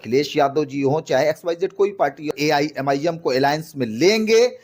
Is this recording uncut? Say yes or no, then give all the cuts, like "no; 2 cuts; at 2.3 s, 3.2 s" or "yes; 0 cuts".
no; 1 cut; at 2.3 s